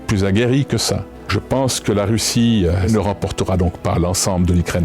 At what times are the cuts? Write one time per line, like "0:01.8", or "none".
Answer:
0:01.3
0:02.9